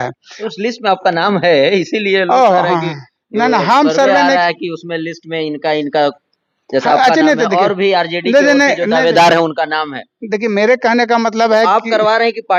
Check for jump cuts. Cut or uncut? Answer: uncut